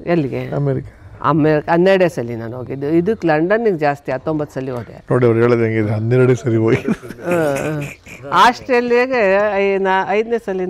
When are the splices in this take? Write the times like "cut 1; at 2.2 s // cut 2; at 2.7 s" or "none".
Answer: none